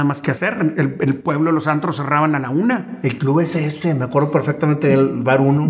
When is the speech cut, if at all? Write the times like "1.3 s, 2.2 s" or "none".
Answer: none